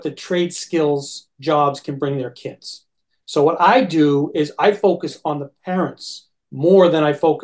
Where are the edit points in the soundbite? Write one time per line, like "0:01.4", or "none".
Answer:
none